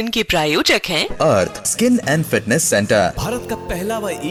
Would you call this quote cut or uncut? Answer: uncut